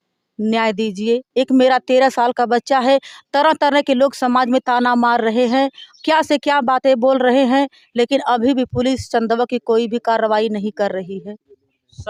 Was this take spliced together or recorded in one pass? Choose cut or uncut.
uncut